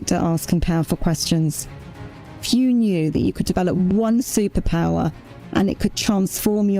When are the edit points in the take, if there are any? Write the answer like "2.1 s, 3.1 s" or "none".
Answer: 2.1 s